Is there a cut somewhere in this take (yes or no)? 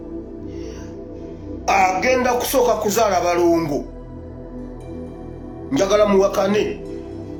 no